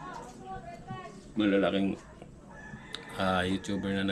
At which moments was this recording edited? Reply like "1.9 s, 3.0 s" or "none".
none